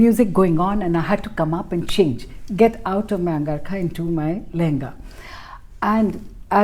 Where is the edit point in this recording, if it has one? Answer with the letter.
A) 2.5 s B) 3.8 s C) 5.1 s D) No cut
D